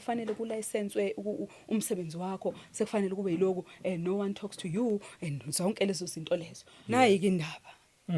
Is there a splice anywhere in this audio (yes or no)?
yes